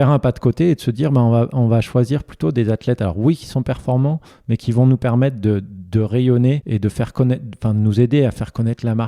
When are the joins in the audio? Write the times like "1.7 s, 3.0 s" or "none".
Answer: 6.6 s